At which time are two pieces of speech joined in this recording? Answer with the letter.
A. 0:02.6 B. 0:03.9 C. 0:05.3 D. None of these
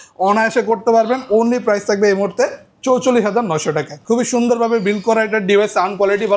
B